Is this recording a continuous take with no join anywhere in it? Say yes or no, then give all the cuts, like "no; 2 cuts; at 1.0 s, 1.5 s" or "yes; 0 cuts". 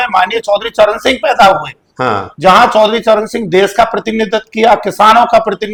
yes; 0 cuts